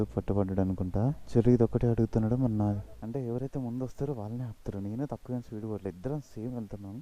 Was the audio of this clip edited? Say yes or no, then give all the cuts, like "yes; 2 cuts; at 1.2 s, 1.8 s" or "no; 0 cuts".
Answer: yes; 2 cuts; at 1.2 s, 2.9 s